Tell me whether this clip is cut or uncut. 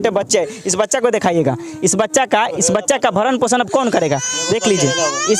uncut